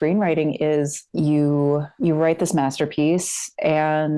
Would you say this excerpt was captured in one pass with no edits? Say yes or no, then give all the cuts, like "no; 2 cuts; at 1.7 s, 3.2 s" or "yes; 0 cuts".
yes; 0 cuts